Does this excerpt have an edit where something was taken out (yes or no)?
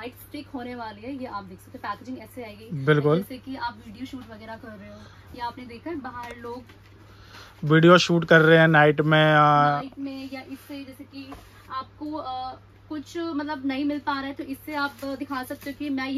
no